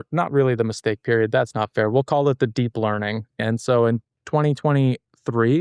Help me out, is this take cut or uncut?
cut